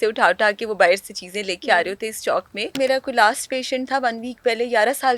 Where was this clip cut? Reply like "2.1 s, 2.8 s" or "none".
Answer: 2.7 s